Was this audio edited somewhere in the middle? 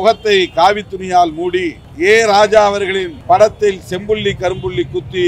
yes; 2 cuts; at 1.8 s, 3.1 s

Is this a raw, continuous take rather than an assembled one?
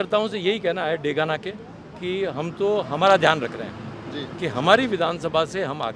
yes; 0 cuts

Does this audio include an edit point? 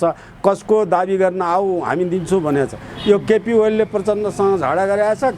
no; 0 cuts

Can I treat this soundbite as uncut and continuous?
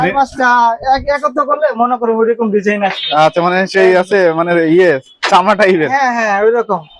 yes; 0 cuts

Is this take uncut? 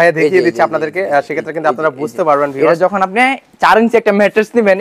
yes; 0 cuts

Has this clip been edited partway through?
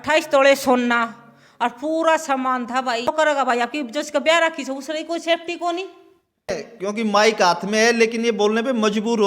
yes; 2 cuts; at 3.1 s, 6.5 s

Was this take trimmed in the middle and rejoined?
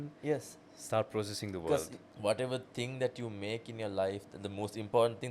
yes; 1 cut; at 2.0 s

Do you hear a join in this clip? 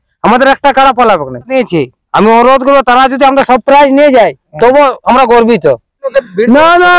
yes; 2 cuts; at 1.5 s, 6.0 s

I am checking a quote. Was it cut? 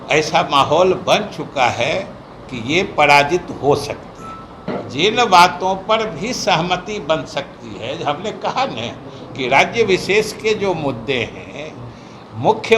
yes; 1 cut; at 4.8 s

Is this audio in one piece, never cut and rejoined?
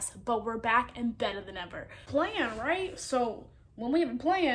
no; 1 cut; at 2.0 s

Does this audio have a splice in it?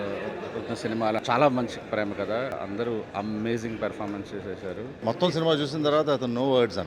yes; 3 cuts; at 1.2 s, 2.5 s, 5.0 s

